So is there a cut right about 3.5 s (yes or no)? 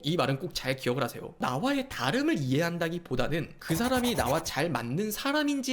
no